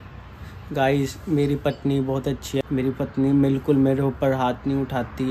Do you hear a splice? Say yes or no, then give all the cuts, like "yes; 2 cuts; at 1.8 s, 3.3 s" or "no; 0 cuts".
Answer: yes; 1 cut; at 2.6 s